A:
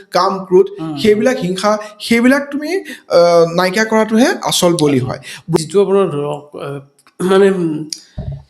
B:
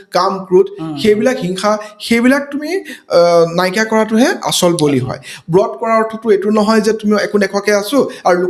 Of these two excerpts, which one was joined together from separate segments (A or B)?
A